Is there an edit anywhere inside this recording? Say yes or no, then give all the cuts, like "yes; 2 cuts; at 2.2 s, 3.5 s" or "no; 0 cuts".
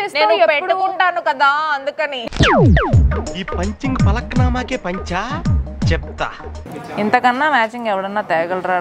yes; 1 cut; at 6.5 s